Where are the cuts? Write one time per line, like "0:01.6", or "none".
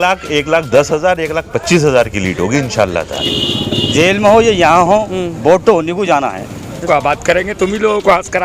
0:03.1
0:06.8